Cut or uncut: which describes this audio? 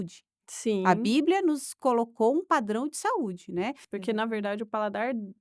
cut